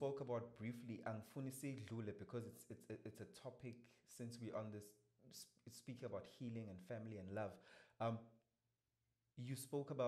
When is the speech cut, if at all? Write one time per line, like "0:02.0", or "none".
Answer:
none